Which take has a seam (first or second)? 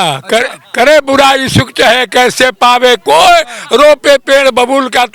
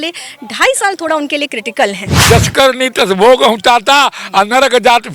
second